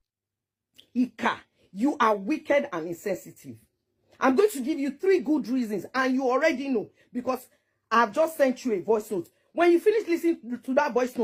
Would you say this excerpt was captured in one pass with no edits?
yes; 0 cuts

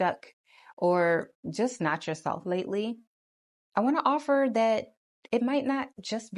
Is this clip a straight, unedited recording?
yes; 0 cuts

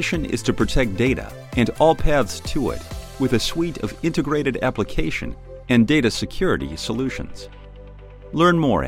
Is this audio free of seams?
yes; 0 cuts

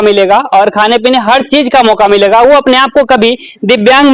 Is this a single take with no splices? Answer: yes; 0 cuts

